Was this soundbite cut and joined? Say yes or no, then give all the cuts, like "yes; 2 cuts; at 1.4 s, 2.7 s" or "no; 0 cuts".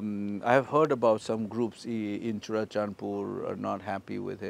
no; 0 cuts